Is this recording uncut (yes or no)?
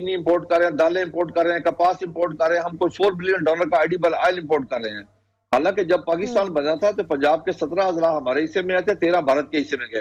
yes